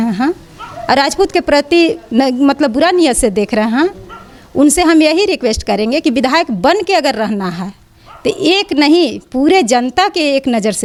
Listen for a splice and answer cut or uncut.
uncut